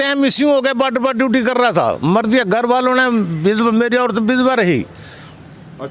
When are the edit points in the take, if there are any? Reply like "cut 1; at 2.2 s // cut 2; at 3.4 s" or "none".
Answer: none